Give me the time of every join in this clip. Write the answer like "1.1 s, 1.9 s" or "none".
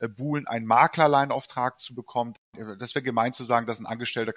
2.5 s